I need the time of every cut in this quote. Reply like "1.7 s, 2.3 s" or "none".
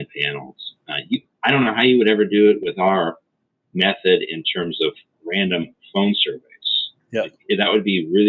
none